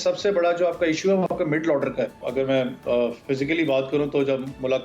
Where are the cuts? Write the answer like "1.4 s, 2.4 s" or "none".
2.2 s